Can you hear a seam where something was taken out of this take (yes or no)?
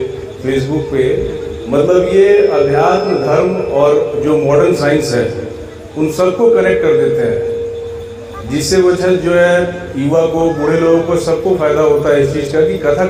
no